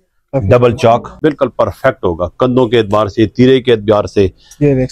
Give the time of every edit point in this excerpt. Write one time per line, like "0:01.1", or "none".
0:01.1